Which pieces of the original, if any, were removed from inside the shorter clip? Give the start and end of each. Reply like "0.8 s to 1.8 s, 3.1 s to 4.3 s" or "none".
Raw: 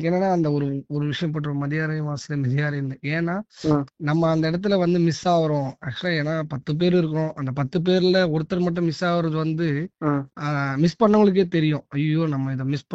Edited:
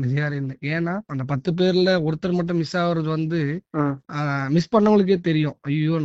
3.5 s to 7.4 s